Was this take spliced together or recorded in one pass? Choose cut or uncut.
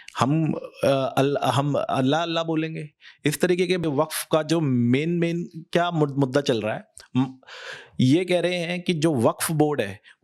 cut